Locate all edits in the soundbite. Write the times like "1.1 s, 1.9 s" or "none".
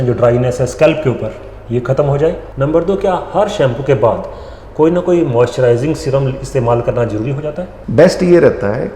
2.5 s, 7.7 s